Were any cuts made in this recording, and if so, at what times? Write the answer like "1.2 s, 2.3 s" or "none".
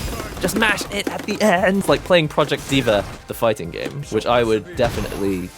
1.8 s, 3.9 s